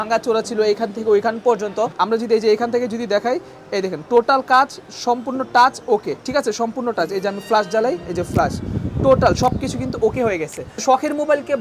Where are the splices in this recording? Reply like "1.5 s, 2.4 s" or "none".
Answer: 2.0 s, 10.7 s